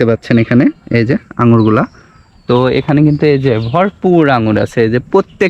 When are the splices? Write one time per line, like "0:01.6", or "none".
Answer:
none